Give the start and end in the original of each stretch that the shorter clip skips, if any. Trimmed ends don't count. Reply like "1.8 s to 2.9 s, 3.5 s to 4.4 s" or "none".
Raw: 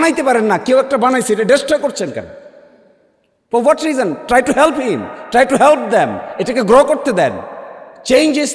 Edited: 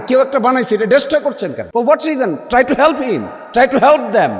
2.2 s to 3.4 s